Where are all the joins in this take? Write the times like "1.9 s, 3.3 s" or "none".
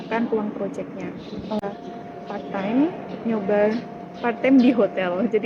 1.6 s